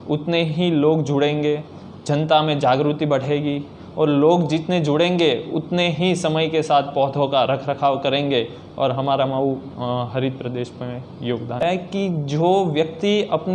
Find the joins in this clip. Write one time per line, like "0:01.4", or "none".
0:11.6